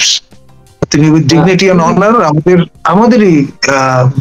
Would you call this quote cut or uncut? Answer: uncut